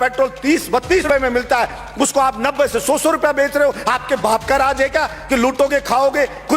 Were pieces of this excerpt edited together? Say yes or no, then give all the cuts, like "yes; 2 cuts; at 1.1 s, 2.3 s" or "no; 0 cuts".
yes; 1 cut; at 1.0 s